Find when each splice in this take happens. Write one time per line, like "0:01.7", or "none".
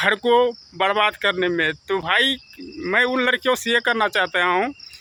none